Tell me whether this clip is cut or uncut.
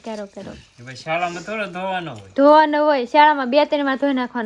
uncut